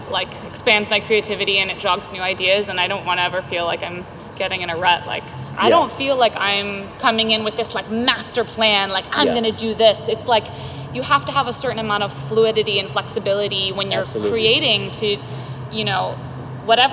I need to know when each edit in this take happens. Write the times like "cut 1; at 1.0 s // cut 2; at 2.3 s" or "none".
cut 1; at 5.5 s